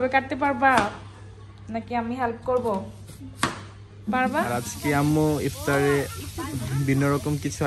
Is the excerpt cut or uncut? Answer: cut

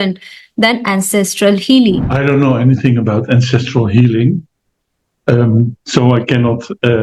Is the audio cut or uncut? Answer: cut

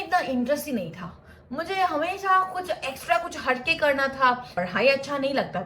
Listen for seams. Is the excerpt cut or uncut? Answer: cut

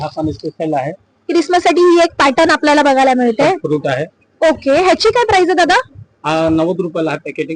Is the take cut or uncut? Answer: uncut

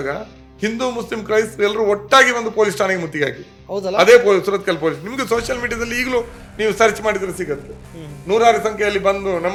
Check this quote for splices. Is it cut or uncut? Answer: uncut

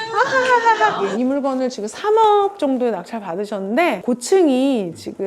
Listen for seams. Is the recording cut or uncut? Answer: cut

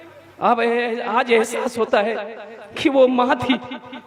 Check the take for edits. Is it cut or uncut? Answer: uncut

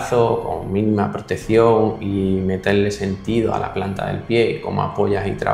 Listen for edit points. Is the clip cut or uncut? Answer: uncut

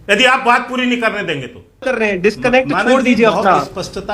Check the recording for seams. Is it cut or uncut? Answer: cut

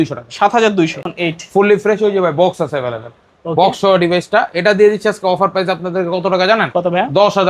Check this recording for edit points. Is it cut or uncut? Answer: cut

